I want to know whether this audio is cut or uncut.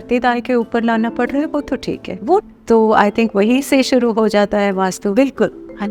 cut